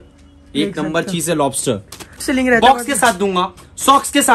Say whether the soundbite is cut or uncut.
cut